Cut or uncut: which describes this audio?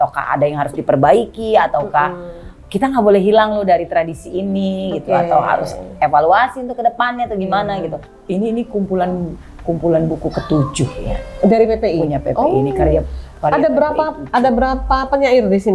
cut